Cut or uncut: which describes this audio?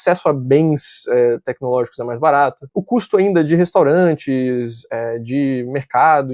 uncut